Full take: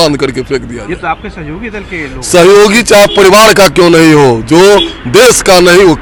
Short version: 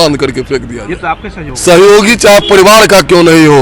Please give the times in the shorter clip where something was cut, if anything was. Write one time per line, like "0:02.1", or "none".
0:01.5